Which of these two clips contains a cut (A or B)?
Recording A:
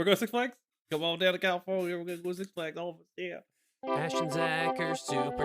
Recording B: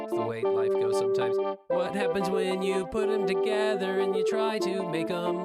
A